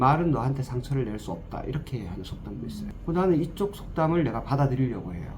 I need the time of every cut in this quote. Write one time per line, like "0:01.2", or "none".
0:02.9